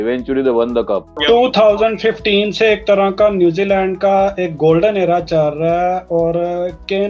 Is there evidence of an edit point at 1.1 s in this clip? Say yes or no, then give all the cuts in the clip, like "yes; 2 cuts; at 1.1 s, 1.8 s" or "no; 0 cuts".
yes; 1 cut; at 1.1 s